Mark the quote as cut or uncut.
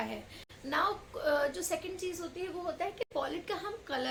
uncut